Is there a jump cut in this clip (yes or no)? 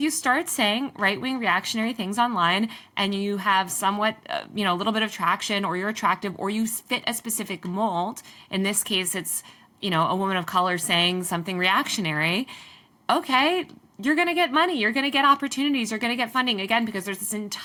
no